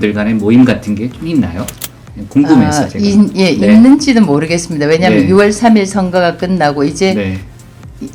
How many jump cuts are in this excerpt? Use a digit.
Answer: 0